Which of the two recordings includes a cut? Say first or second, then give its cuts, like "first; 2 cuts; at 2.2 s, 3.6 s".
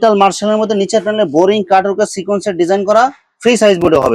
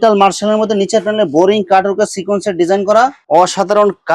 second; 1 cut; at 3.2 s